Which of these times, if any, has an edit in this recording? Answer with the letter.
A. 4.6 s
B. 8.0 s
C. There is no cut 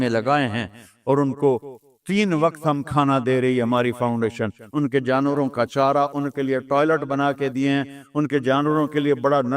A